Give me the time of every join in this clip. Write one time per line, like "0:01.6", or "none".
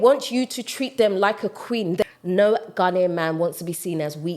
0:02.0